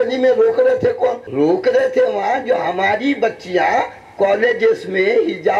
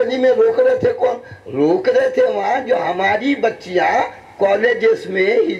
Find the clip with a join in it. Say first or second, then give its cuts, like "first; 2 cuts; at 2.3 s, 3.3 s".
first; 1 cut; at 1.2 s